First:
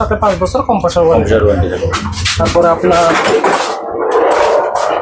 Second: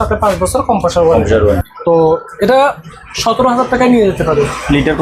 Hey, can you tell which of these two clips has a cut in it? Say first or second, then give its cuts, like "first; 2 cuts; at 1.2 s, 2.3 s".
second; 1 cut; at 1.4 s